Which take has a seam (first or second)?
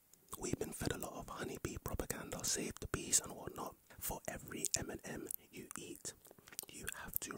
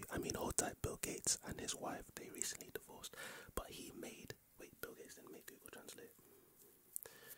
first